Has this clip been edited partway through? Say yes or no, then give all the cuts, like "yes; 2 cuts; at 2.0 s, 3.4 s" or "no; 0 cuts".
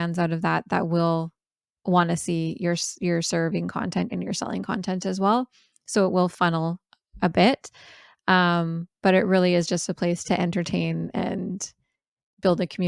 no; 0 cuts